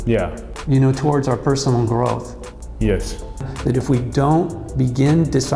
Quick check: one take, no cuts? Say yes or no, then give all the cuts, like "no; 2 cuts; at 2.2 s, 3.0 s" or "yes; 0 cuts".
no; 1 cut; at 3.5 s